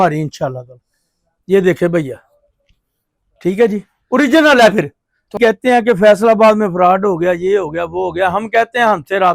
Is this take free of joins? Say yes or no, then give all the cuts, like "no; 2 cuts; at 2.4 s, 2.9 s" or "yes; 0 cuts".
no; 1 cut; at 5.3 s